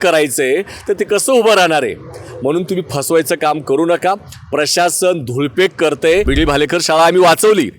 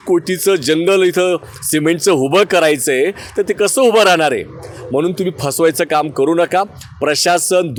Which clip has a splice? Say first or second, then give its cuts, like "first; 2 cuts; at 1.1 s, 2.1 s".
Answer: first; 1 cut; at 6.3 s